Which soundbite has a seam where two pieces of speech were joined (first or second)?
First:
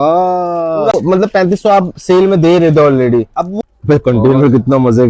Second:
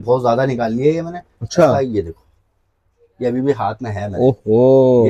first